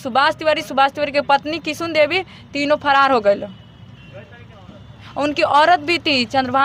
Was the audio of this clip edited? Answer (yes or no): no